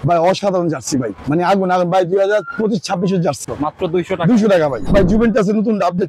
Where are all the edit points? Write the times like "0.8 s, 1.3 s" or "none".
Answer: 1.2 s, 3.4 s, 4.8 s